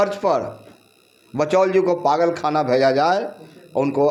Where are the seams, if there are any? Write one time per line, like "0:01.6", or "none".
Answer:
none